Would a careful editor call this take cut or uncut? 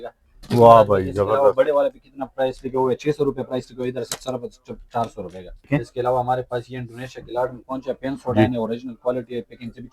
cut